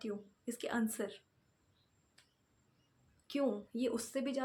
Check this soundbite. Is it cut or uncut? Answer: uncut